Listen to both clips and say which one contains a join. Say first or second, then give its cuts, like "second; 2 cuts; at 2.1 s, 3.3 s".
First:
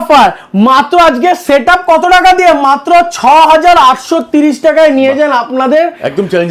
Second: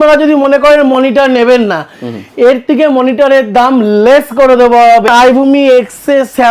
second; 1 cut; at 5.1 s